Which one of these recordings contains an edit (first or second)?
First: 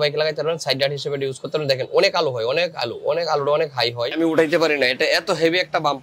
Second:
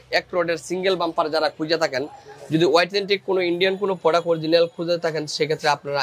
first